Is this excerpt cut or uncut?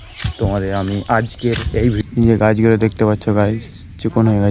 cut